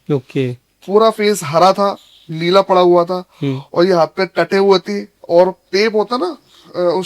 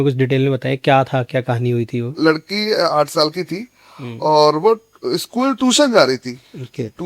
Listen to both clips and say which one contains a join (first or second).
second